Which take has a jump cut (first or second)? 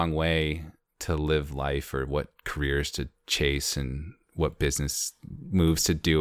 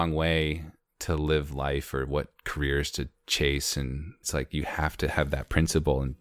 second